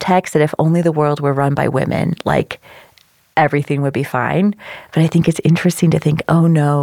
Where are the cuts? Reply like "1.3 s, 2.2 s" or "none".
none